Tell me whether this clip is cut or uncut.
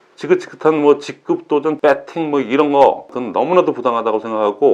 cut